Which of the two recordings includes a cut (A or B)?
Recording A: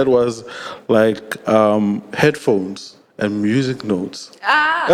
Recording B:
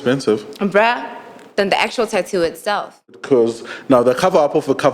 B